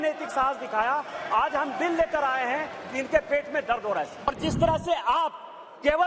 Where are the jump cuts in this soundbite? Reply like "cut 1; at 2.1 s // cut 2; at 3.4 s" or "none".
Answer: cut 1; at 4.3 s